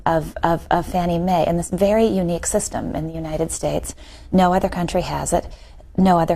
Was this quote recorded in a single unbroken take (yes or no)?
no